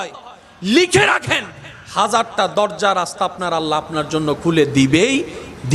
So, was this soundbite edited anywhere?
no; 0 cuts

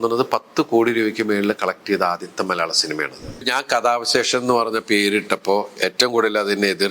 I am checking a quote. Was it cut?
yes; 1 cut; at 3.3 s

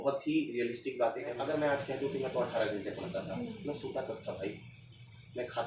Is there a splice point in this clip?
yes; 1 cut; at 1.3 s

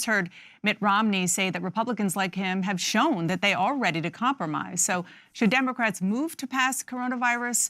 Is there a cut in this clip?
yes; 1 cut; at 1.0 s

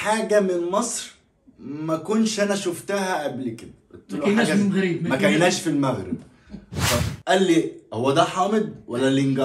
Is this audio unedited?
no; 1 cut; at 7.0 s

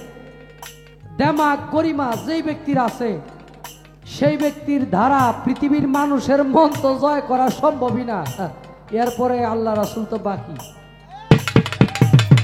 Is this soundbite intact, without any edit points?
yes; 0 cuts

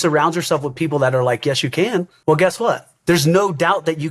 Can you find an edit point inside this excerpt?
yes; 2 cuts; at 2.1 s, 2.9 s

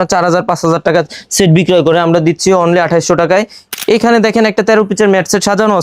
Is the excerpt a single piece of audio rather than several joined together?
no; 1 cut; at 3.6 s

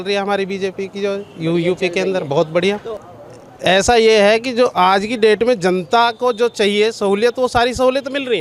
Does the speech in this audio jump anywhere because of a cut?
no; 0 cuts

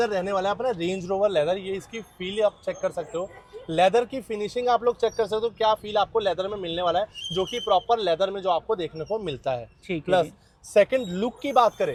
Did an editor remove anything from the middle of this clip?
no; 0 cuts

